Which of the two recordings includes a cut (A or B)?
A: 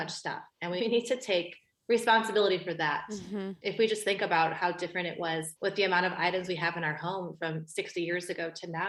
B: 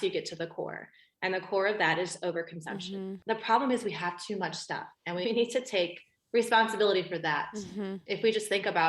B